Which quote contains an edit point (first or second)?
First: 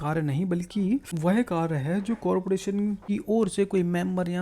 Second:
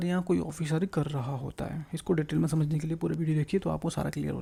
first